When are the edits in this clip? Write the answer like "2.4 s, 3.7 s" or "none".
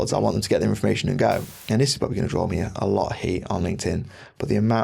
1.5 s